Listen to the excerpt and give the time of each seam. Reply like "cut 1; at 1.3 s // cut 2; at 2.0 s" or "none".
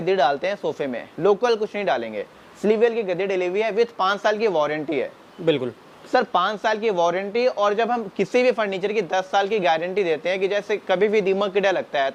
none